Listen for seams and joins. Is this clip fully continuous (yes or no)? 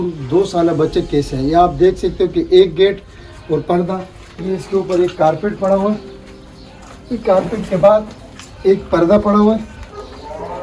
yes